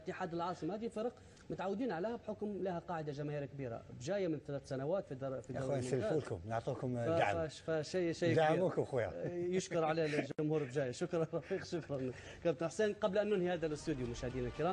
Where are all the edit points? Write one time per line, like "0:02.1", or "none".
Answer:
0:04.3